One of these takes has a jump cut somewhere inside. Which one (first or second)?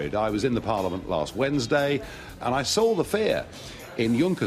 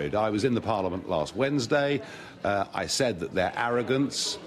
first